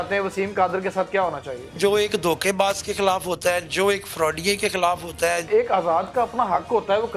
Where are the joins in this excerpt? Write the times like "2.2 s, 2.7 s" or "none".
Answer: 1.8 s, 5.4 s

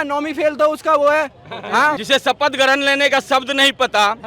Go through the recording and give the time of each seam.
2.0 s

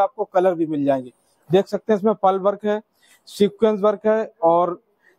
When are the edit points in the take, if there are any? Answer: none

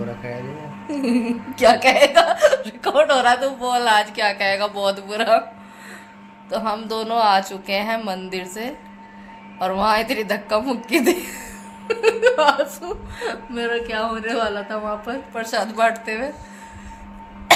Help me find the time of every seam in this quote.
none

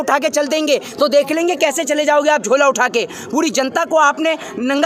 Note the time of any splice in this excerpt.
none

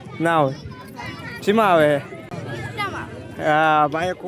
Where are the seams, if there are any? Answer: 2.3 s

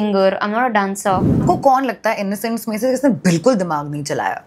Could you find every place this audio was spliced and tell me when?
1.4 s

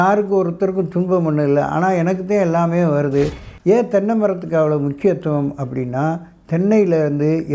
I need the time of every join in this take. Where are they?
3.5 s

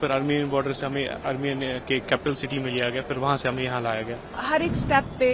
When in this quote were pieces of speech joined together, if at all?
4.3 s

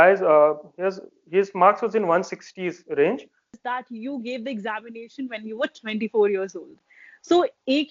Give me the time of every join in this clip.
3.5 s

